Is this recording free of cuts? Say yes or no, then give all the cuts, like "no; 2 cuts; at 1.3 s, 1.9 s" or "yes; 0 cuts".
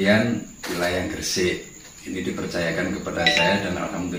yes; 0 cuts